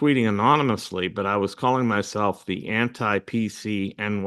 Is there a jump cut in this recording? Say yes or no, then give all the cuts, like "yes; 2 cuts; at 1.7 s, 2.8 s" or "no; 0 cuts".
no; 0 cuts